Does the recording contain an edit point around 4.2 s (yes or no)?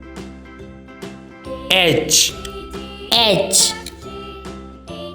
yes